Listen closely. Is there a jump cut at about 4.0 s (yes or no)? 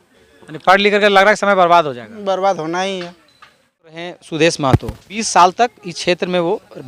yes